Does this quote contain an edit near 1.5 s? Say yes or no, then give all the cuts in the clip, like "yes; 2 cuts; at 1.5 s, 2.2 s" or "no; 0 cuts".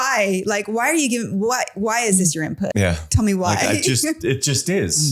no; 1 cut; at 2.7 s